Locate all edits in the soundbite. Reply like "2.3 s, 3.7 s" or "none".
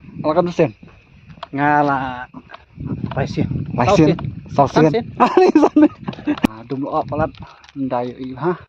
6.4 s